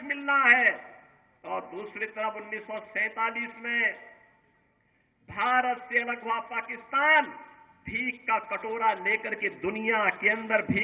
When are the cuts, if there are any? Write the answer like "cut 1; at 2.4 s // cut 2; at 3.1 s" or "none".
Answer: none